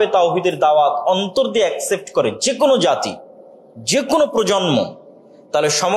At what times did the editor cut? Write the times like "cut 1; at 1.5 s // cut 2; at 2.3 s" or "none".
none